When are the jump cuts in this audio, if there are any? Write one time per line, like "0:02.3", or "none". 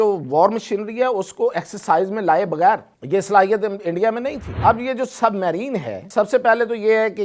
0:02.9
0:04.5
0:06.0